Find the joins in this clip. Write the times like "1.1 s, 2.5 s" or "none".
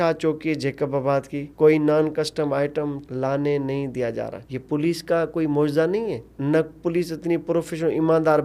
1.4 s, 6.3 s